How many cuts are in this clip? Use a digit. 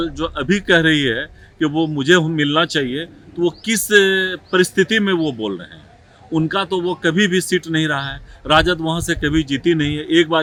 0